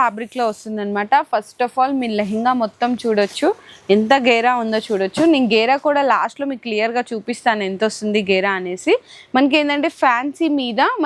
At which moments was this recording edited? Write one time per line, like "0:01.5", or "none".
none